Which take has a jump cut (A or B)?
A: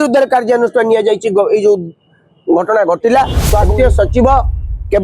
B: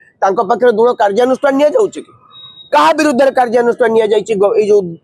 A